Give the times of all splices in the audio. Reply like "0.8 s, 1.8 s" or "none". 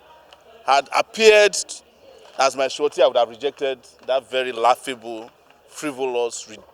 none